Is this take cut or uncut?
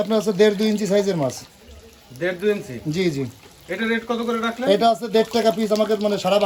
uncut